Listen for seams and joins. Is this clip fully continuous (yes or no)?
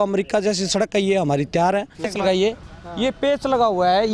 no